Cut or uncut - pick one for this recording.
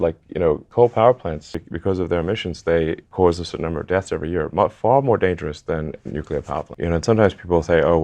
cut